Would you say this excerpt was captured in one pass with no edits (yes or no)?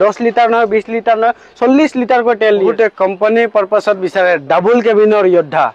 no